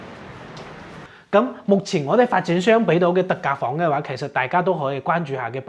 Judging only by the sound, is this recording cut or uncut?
cut